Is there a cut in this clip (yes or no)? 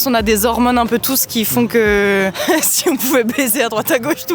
no